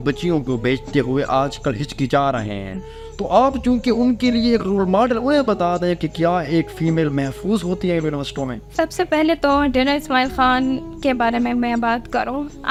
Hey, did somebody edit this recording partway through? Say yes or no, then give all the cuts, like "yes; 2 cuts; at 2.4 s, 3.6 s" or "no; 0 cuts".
no; 0 cuts